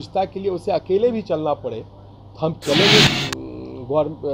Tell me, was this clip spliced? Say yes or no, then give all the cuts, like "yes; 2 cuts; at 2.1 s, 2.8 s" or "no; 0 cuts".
yes; 1 cut; at 3.1 s